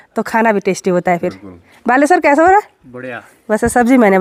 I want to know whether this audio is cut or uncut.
uncut